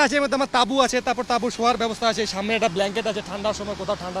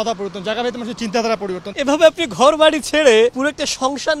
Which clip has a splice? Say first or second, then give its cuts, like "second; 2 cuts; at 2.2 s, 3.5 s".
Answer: second; 2 cuts; at 1.7 s, 3.3 s